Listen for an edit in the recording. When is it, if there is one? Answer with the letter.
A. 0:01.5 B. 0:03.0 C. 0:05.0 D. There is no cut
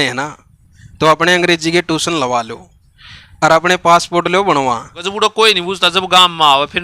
C